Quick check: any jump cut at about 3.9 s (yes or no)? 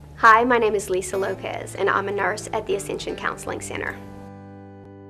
yes